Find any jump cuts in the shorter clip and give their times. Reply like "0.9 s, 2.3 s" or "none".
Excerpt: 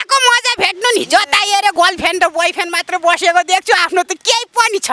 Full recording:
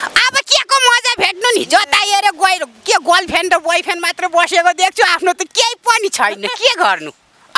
1.7 s